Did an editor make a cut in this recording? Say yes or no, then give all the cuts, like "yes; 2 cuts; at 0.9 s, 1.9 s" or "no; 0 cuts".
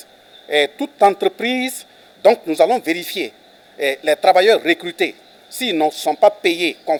no; 0 cuts